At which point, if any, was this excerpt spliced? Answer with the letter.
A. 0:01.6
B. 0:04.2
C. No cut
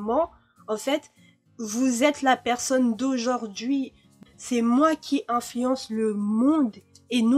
B